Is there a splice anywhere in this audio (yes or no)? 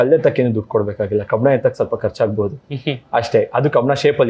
no